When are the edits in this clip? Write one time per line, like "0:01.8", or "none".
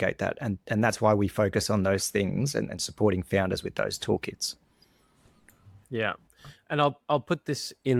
none